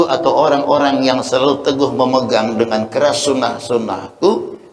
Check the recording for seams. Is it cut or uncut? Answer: uncut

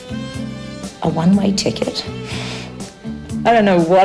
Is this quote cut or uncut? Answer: uncut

